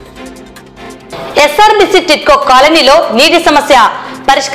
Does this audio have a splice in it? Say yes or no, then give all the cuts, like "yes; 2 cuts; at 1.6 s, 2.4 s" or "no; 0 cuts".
yes; 1 cut; at 1.1 s